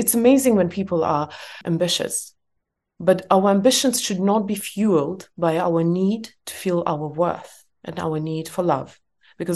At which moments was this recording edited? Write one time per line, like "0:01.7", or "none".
0:01.5